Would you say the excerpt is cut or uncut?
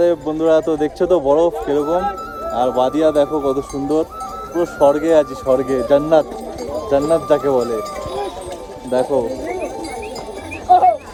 uncut